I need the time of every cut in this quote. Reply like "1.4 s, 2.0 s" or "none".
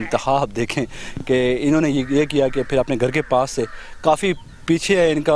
none